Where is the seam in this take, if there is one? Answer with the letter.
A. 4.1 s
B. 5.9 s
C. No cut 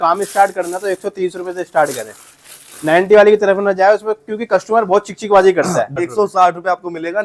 B